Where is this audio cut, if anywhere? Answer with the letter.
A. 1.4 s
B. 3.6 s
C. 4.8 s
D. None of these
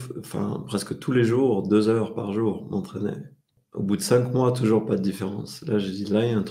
B